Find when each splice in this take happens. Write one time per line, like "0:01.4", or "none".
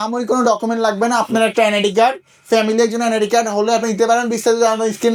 none